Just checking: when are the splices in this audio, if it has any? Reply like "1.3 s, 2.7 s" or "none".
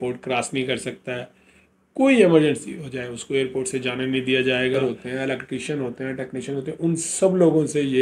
4.8 s